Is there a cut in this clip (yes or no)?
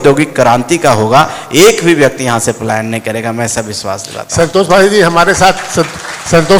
no